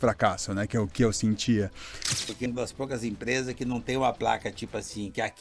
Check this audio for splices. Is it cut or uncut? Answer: cut